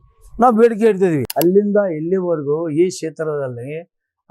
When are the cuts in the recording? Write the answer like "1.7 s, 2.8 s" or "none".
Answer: 1.3 s